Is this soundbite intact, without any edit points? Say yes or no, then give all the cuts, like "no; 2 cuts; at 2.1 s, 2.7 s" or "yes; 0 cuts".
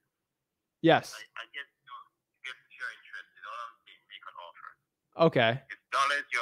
yes; 0 cuts